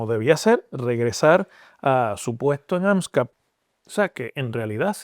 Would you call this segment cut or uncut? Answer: cut